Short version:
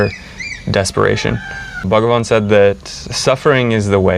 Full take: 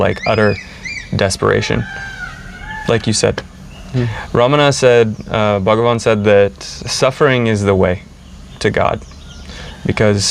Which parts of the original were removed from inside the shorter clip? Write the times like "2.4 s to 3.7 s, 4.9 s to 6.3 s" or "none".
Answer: 2.3 s to 5.6 s